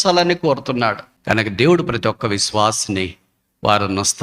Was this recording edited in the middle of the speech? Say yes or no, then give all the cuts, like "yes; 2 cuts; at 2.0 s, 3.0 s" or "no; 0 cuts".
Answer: yes; 1 cut; at 1.1 s